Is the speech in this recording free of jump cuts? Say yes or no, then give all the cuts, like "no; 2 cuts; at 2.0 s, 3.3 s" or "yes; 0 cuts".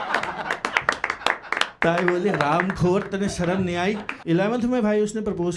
no; 1 cut; at 4.1 s